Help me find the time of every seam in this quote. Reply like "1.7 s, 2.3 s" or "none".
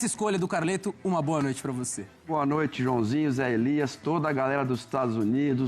none